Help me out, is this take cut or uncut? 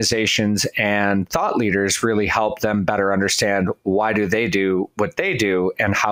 uncut